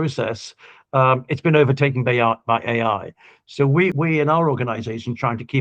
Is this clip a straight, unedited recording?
no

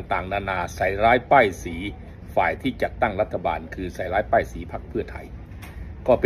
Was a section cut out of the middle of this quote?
no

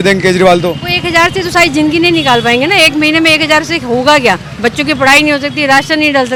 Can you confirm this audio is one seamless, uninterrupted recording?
yes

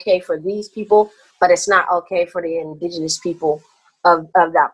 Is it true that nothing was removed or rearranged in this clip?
yes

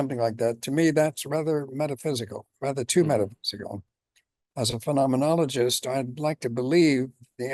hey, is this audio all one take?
yes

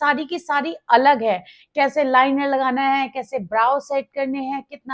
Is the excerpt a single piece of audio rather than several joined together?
yes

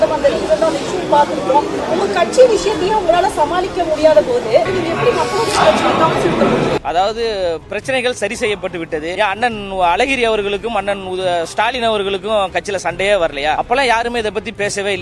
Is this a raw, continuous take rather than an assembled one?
no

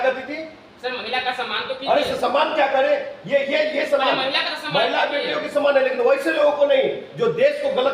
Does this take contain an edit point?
no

